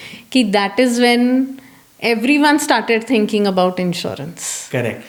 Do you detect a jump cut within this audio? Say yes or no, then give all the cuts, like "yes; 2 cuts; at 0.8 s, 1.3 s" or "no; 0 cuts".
no; 0 cuts